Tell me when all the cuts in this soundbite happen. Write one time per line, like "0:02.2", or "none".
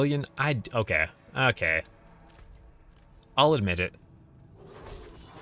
none